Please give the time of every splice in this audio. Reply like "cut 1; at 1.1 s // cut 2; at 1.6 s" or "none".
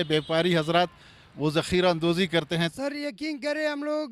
cut 1; at 2.7 s